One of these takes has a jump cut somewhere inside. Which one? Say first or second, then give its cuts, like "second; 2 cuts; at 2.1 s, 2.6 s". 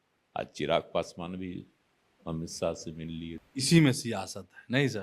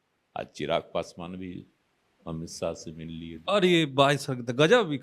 first; 1 cut; at 3.3 s